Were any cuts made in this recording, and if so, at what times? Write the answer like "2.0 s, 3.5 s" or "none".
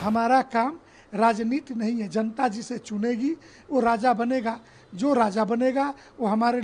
none